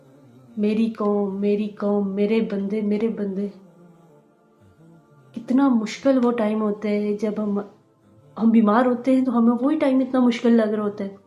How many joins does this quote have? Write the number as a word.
two